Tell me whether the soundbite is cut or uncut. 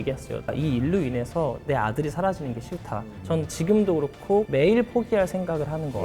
cut